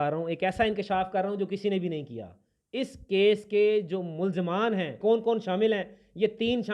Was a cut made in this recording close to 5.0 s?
yes; 1 cut; at 5.0 s

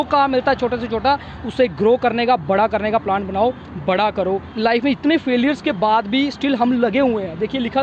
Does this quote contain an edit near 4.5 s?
yes; 1 cut; at 4.5 s

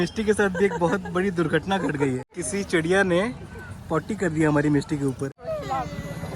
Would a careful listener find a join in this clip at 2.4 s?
yes; 2 cuts; at 2.4 s, 5.4 s

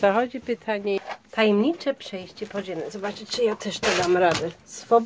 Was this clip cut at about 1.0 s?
yes; 1 cut; at 1.0 s

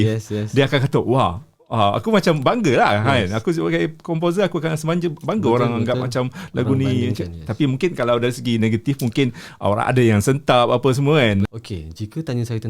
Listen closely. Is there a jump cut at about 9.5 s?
no; 1 cut; at 11.5 s

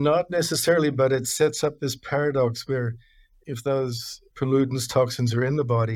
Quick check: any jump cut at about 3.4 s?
yes; 2 cuts; at 3.4 s, 4.2 s

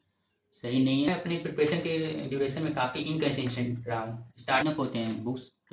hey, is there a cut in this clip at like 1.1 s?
yes; 2 cuts; at 1.1 s, 4.6 s

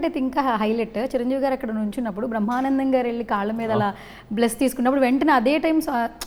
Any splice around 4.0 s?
no; 0 cuts

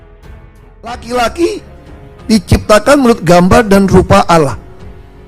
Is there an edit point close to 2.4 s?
no; 1 cut; at 1.0 s

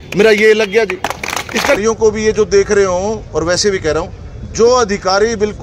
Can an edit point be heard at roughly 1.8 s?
yes; 1 cut; at 1.8 s

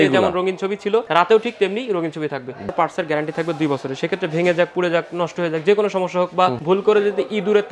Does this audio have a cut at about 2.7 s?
yes; 3 cuts; at 1.1 s, 2.7 s, 6.6 s

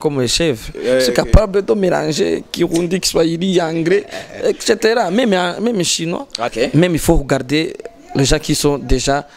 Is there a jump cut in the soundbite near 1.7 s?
no; 1 cut; at 6.4 s

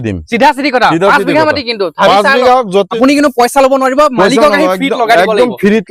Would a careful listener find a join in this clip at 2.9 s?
yes; 1 cut; at 2.9 s

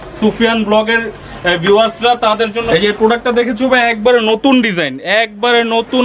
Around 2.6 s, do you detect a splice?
yes; 1 cut; at 2.6 s

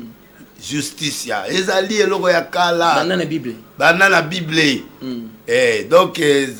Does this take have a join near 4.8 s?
no; 0 cuts

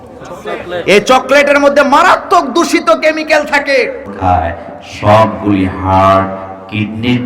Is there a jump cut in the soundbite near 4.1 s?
yes; 1 cut; at 4.1 s

